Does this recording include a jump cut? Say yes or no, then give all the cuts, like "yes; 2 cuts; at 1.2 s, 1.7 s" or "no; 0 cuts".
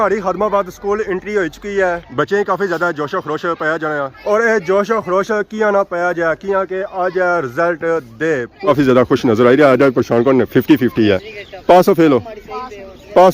yes; 2 cuts; at 2.0 s, 8.6 s